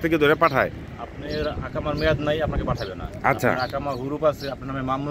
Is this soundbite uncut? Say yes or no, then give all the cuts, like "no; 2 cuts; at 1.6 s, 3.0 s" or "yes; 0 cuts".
yes; 0 cuts